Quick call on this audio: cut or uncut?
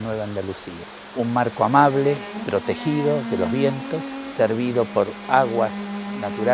cut